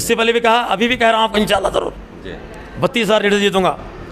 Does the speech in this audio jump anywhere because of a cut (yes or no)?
no